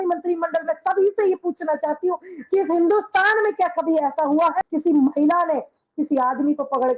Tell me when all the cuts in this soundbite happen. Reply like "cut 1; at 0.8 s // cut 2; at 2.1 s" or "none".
cut 1; at 4.6 s